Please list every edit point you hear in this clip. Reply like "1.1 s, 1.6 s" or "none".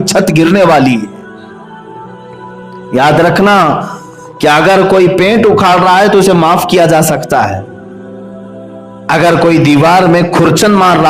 7.6 s, 9.0 s